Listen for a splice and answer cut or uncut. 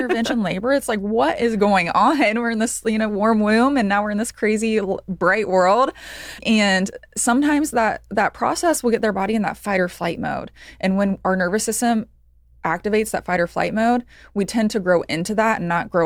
uncut